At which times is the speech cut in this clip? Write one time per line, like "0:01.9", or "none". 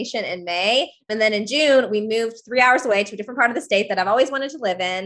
0:01.1